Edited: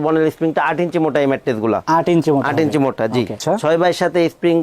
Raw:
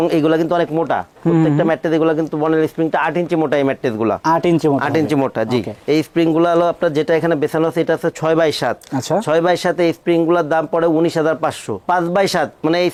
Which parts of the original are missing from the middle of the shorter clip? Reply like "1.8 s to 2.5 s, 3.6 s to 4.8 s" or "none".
5.7 s to 9.0 s